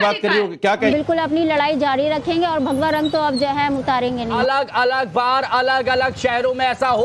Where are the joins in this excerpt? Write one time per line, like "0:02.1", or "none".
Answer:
0:00.9
0:04.3